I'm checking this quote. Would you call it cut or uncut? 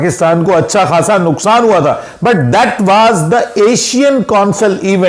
uncut